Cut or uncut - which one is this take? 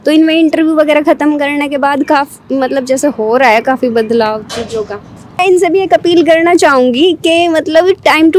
cut